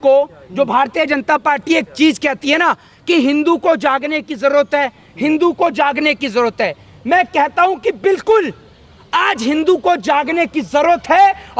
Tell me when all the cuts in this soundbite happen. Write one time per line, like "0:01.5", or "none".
none

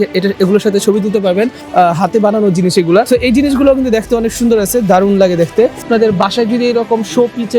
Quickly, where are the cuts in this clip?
0:01.6
0:03.1
0:05.8

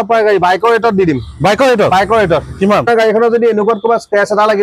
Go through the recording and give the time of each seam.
0:02.9

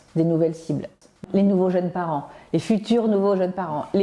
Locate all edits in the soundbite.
none

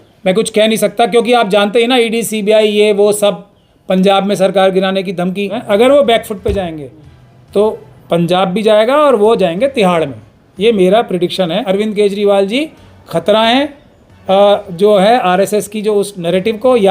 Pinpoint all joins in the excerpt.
0:05.6
0:11.6

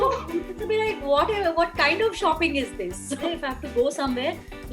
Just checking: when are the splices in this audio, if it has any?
0:03.2

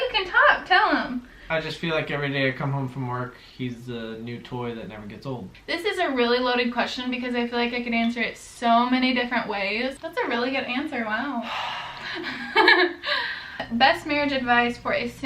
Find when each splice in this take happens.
0:01.4
0:05.5
0:10.0
0:13.6

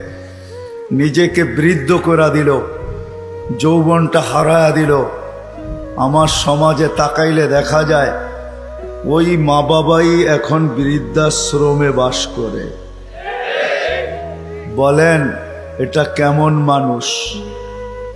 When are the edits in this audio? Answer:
0:17.3

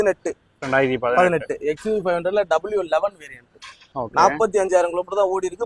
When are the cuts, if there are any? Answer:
none

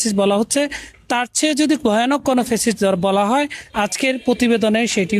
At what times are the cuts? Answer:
0:03.6

